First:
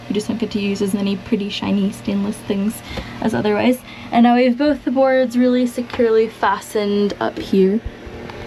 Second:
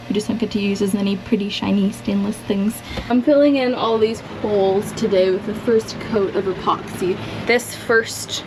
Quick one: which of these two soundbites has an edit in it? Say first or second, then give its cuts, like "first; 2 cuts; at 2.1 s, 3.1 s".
second; 2 cuts; at 3.1 s, 7.3 s